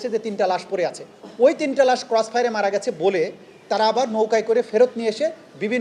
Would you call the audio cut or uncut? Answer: uncut